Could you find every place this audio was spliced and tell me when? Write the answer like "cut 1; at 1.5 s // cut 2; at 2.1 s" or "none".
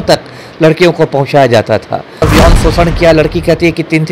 cut 1; at 2.3 s

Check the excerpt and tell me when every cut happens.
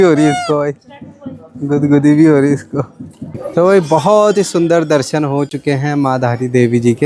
cut 1; at 3.4 s

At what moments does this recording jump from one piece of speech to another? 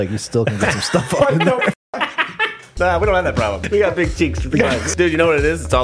cut 1; at 2.7 s // cut 2; at 3.6 s // cut 3; at 4.9 s

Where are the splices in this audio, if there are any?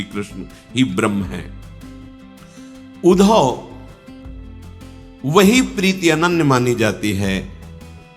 cut 1; at 1.5 s // cut 2; at 3.0 s // cut 3; at 3.7 s // cut 4; at 5.2 s

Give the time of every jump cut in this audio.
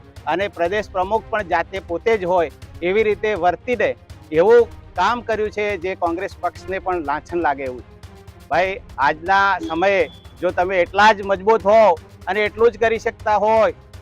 none

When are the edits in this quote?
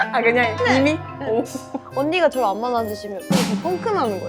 cut 1; at 1.6 s

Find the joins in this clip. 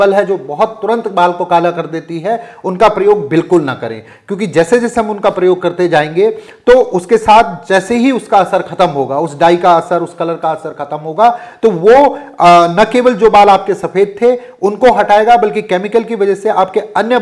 none

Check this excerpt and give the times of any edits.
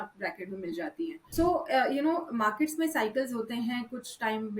cut 1; at 1.2 s

